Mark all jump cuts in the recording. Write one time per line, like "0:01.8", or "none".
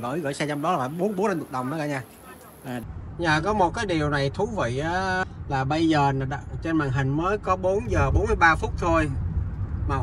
0:02.9
0:05.2